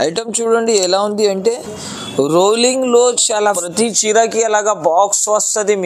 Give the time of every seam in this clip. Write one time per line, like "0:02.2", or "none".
0:03.6